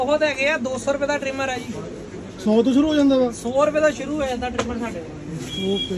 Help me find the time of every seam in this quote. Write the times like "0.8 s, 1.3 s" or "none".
none